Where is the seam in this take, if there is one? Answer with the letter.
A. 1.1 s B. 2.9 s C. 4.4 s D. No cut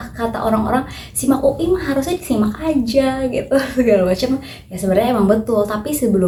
D